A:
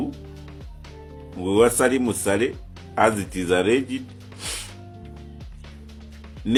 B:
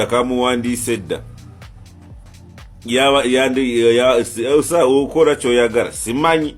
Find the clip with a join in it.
B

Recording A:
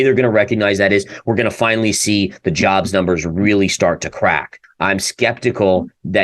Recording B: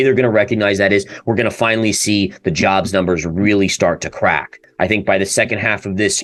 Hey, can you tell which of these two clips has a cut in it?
A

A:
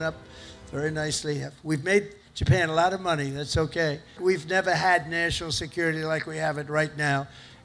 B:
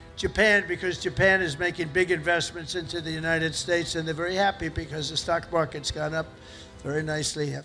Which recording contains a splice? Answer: A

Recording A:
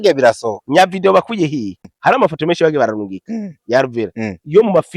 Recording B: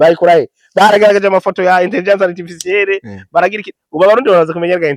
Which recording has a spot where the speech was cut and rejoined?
A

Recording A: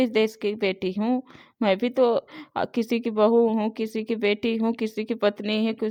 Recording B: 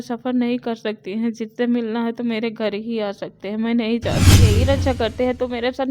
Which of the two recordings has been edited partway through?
B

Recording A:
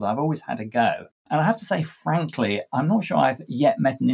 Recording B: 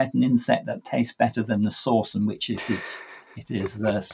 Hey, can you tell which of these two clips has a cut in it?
A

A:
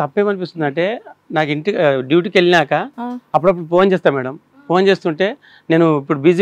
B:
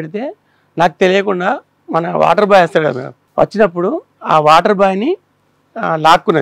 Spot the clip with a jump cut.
B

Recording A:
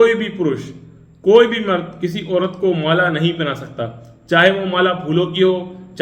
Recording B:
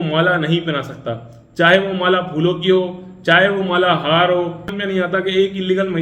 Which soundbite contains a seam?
B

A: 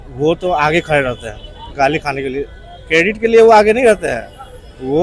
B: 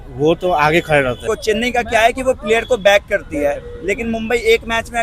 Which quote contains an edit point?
B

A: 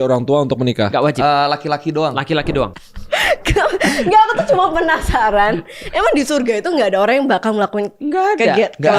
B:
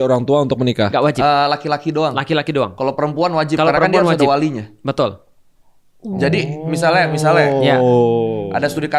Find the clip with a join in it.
A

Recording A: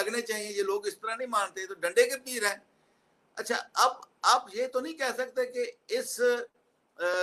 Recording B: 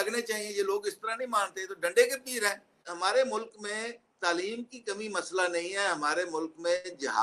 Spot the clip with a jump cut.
B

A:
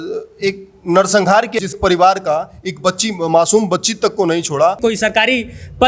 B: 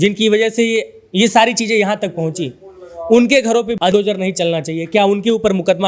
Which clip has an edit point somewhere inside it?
A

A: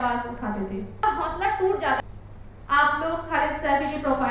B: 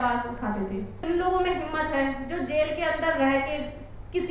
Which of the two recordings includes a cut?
B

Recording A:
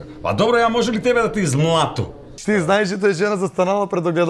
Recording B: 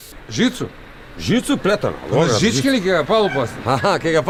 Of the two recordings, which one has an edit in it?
A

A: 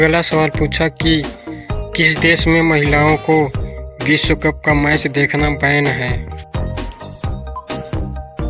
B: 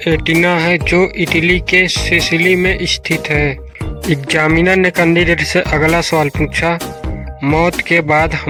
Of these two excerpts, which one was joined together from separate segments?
A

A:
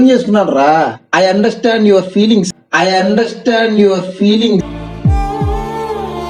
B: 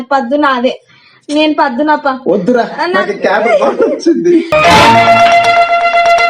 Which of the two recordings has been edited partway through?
B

